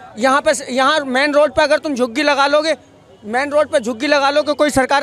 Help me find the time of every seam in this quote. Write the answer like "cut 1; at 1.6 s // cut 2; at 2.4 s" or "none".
none